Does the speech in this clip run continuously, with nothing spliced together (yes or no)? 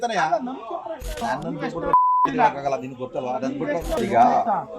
no